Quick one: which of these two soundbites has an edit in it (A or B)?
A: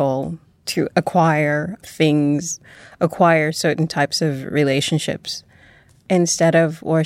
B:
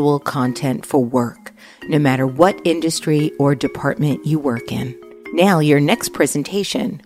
A